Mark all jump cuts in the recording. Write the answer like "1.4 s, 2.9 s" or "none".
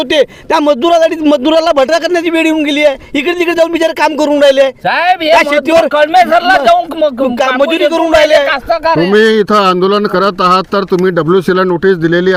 none